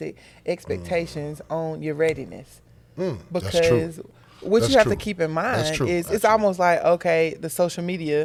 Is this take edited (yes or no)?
no